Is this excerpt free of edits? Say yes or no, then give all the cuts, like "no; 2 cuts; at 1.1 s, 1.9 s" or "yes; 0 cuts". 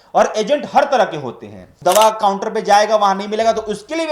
no; 1 cut; at 1.7 s